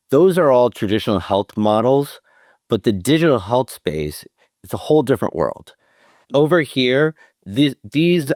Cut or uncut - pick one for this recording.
uncut